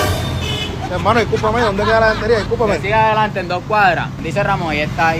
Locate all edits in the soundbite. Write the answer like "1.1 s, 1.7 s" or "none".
4.2 s